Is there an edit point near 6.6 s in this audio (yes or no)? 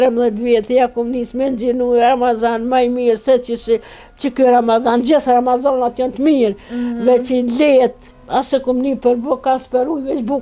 no